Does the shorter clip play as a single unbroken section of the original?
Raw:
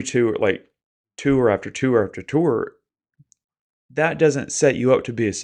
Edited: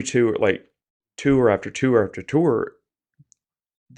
yes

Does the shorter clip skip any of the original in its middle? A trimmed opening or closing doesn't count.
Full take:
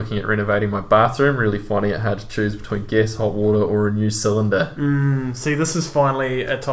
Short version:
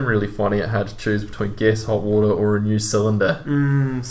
no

